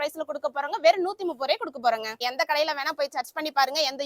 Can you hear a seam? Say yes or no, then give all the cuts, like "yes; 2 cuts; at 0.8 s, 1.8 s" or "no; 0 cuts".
yes; 1 cut; at 2.2 s